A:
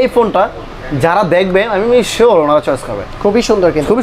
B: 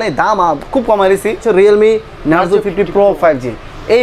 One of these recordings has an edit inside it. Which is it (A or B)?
B